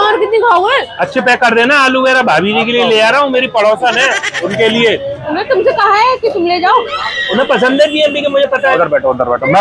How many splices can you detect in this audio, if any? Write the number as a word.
five